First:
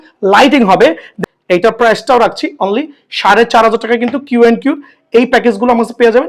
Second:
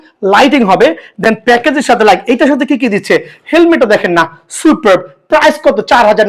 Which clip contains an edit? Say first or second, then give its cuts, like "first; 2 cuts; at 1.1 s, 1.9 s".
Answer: first; 1 cut; at 1.1 s